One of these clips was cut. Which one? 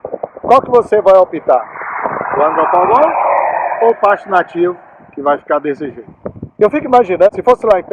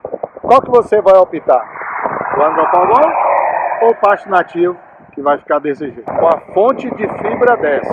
second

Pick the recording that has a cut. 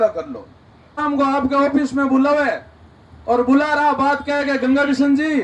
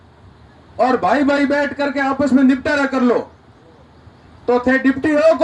first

